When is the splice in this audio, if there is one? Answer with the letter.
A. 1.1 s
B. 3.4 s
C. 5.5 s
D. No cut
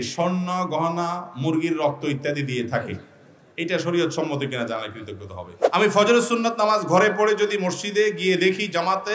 C